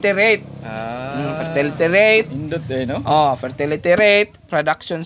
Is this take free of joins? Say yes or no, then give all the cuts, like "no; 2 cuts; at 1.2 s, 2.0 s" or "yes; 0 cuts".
yes; 0 cuts